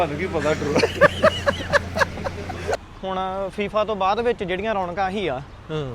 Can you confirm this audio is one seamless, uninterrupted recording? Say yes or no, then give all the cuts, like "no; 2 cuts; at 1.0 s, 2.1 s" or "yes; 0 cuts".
no; 1 cut; at 2.7 s